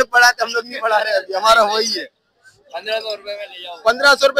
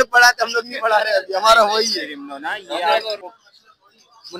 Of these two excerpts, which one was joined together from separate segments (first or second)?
second